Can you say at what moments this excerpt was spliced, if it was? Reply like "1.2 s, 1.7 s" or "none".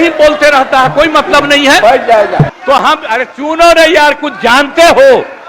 2.5 s